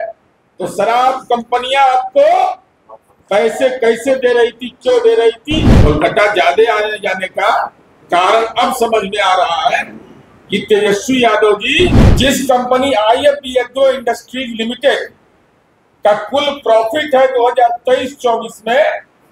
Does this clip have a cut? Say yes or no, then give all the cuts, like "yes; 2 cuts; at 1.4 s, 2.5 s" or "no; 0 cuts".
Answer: yes; 2 cuts; at 5.7 s, 12.0 s